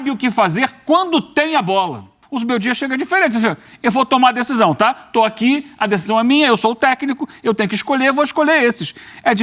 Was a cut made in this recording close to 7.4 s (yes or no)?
no